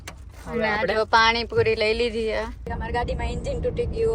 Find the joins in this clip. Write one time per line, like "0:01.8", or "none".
0:02.8